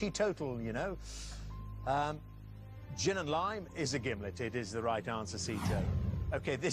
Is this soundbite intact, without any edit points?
yes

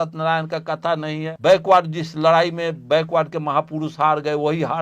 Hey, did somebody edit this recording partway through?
yes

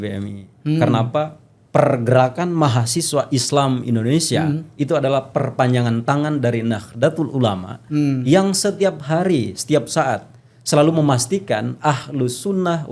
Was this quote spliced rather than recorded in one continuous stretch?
no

